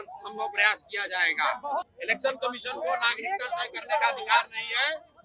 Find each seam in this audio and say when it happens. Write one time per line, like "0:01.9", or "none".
0:01.9